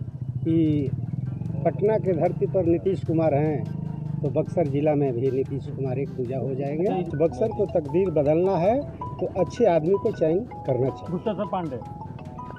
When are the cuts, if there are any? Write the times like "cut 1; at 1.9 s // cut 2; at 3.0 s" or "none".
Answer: cut 1; at 7.1 s